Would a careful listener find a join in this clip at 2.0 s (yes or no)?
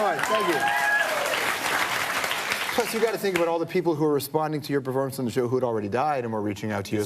yes